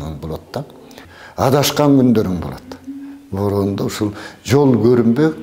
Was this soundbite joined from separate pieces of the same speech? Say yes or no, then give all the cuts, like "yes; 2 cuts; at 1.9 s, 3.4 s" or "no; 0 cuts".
yes; 1 cut; at 1.1 s